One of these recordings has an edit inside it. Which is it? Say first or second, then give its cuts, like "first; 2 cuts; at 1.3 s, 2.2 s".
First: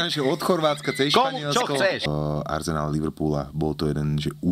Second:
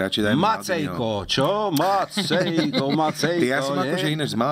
first; 1 cut; at 2.0 s